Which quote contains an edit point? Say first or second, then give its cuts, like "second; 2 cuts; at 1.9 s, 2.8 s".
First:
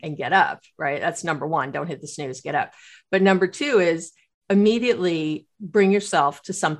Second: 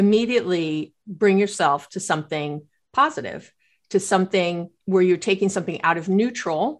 second; 1 cut; at 4.7 s